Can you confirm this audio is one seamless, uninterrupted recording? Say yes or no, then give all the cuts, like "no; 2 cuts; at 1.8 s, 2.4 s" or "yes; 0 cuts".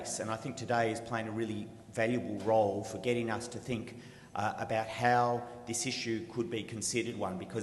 yes; 0 cuts